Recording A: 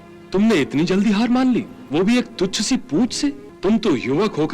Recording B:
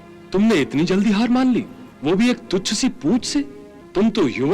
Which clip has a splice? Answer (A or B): A